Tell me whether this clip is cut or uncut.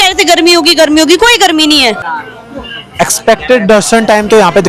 cut